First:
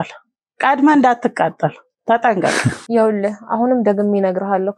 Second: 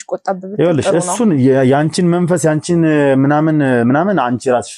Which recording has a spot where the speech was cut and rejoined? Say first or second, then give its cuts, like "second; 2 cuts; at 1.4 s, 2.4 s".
first; 1 cut; at 2.8 s